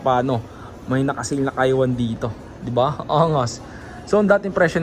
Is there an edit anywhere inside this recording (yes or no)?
no